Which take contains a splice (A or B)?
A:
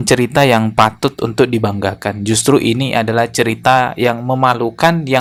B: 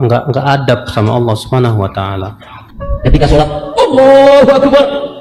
B